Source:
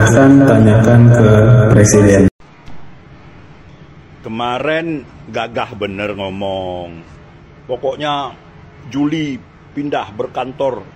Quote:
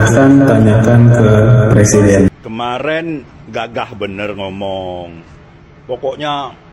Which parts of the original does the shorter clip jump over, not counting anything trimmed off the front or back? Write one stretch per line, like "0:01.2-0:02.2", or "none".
0:02.4-0:04.2